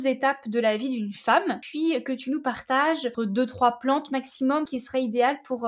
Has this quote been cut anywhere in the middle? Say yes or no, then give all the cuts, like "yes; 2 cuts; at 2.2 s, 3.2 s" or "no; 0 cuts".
yes; 3 cuts; at 1.6 s, 3.1 s, 4.7 s